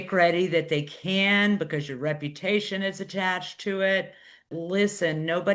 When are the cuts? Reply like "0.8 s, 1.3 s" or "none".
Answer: 4.5 s